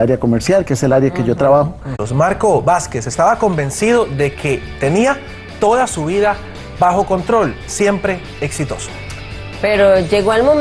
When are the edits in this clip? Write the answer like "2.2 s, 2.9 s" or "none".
none